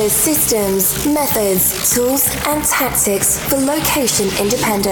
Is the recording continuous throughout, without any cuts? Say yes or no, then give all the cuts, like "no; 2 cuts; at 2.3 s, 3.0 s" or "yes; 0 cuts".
yes; 0 cuts